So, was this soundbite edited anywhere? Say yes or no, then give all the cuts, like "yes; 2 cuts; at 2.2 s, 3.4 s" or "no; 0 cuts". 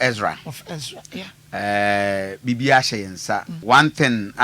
yes; 1 cut; at 3.5 s